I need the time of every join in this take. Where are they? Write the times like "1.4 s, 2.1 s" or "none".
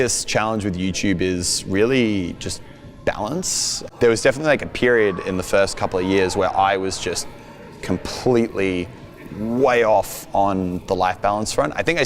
3.8 s